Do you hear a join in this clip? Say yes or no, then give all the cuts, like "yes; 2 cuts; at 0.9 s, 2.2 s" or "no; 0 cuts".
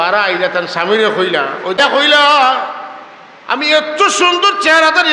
yes; 1 cut; at 1.8 s